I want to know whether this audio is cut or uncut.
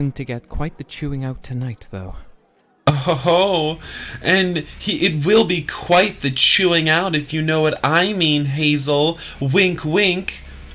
uncut